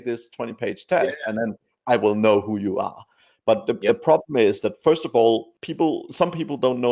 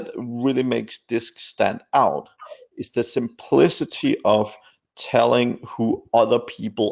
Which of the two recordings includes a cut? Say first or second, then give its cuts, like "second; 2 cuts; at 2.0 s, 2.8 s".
first; 1 cut; at 5.6 s